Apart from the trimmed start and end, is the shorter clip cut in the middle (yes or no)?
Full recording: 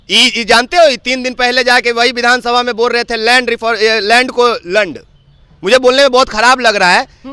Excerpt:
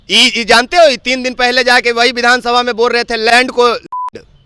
yes